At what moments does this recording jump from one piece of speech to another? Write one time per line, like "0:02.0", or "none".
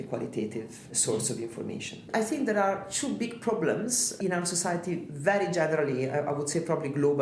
0:00.9
0:02.1
0:04.1